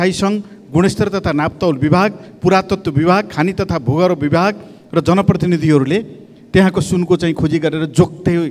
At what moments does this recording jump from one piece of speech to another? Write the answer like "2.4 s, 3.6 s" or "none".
none